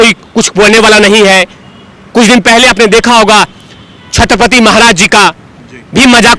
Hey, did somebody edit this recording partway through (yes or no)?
no